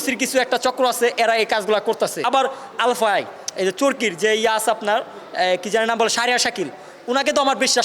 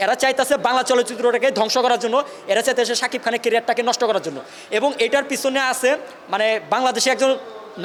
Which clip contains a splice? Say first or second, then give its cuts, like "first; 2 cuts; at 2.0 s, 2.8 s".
first; 1 cut; at 2.2 s